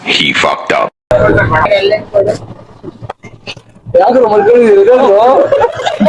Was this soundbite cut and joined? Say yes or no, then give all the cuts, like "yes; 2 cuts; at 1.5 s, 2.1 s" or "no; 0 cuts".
yes; 1 cut; at 1.7 s